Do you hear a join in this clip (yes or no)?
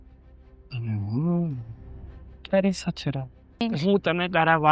yes